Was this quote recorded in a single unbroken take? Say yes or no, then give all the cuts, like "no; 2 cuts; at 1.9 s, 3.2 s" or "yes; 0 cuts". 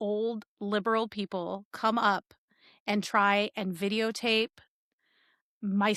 yes; 0 cuts